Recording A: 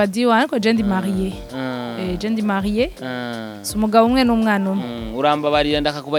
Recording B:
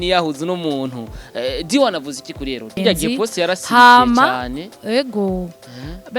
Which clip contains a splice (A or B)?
B